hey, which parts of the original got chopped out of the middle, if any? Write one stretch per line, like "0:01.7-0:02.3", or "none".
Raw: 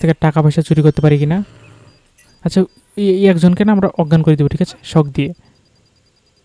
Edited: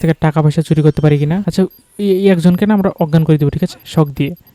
0:01.5-0:02.4